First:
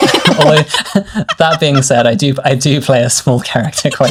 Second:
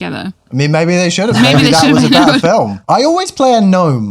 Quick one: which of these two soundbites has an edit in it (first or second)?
second